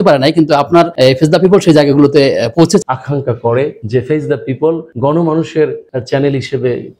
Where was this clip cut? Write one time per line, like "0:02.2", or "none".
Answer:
0:00.9
0:02.8
0:03.8
0:04.9
0:05.9